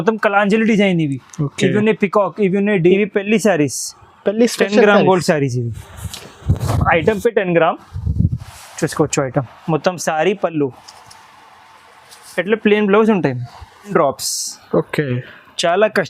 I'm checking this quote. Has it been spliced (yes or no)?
yes